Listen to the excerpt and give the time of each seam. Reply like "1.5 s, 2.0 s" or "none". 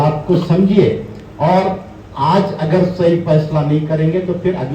none